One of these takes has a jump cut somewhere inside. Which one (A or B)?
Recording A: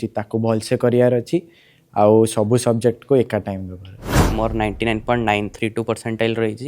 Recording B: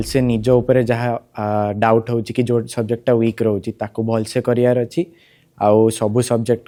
A